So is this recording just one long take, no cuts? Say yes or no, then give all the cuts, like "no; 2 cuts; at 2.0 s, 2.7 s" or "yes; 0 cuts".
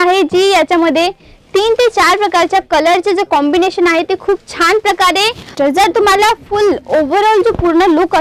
no; 1 cut; at 5.5 s